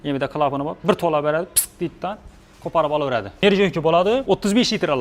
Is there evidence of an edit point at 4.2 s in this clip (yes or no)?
yes